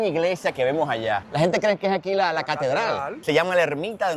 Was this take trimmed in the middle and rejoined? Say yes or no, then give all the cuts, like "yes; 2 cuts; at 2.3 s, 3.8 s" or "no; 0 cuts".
no; 0 cuts